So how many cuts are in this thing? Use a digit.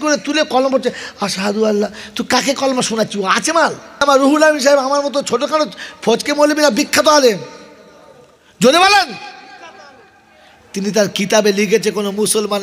1